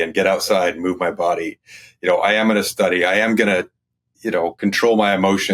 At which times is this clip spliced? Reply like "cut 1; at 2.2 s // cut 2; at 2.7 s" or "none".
none

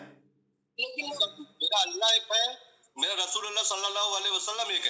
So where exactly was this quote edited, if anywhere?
cut 1; at 1.1 s

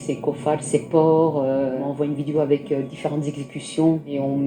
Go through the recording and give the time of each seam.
cut 1; at 1.8 s

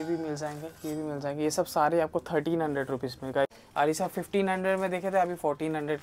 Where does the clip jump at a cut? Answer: cut 1; at 3.6 s

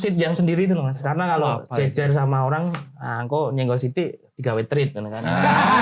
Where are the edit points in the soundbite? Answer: cut 1; at 1.0 s

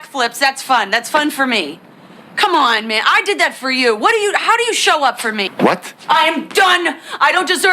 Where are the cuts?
cut 1; at 5.4 s

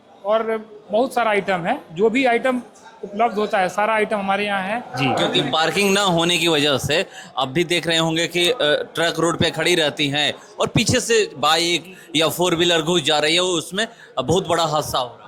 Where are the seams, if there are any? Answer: cut 1; at 4.9 s

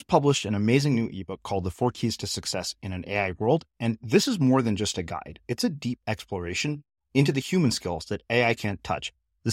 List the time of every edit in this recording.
none

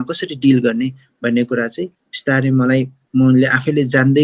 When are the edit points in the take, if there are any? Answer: none

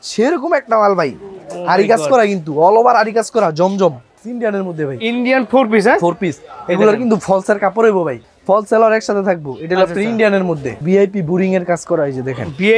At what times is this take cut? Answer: cut 1; at 4.1 s // cut 2; at 8.3 s // cut 3; at 10.8 s

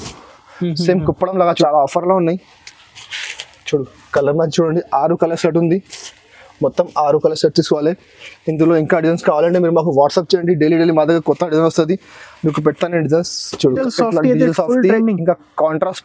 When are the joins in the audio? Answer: cut 1; at 1.6 s // cut 2; at 13.8 s

